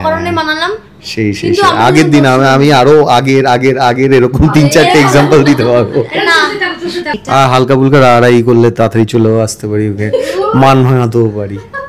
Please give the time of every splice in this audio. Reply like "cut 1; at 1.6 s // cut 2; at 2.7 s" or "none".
cut 1; at 7.2 s